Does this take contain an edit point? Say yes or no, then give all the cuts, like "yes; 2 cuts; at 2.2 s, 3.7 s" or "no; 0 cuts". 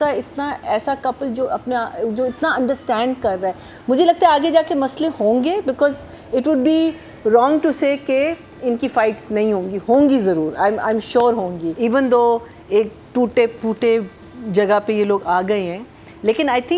yes; 1 cut; at 11.7 s